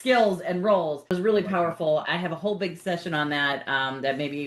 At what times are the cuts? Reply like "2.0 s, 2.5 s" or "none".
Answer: 1.0 s